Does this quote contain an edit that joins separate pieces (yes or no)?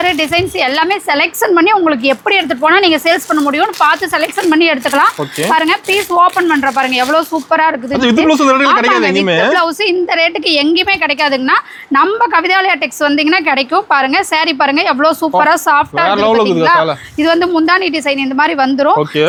no